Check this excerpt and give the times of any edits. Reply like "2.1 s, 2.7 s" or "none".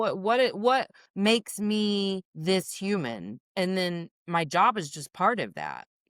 1.0 s, 2.3 s, 3.4 s, 4.1 s